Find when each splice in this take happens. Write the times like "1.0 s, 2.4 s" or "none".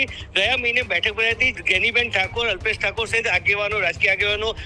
1.6 s